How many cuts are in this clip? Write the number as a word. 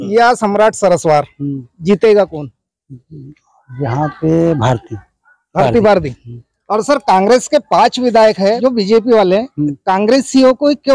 one